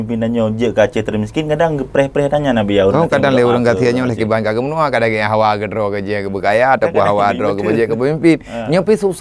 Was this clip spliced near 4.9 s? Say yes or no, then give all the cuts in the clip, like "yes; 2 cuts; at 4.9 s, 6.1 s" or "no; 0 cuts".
no; 0 cuts